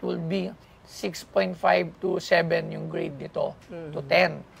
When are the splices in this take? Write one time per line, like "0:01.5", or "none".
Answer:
none